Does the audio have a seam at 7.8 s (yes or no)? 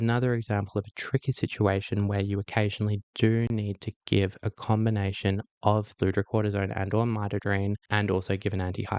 yes